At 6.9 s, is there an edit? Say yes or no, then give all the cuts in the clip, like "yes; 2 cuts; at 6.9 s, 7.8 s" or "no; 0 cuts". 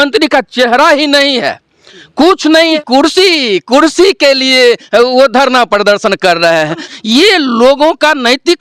yes; 2 cuts; at 2.7 s, 6.9 s